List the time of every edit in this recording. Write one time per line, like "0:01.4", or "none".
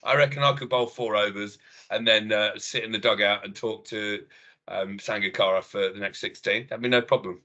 none